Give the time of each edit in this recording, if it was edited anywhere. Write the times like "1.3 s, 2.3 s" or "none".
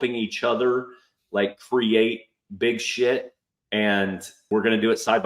4.3 s